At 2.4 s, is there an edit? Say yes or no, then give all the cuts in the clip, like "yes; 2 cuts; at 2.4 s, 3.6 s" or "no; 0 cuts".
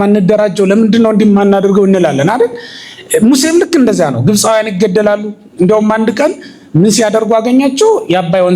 no; 0 cuts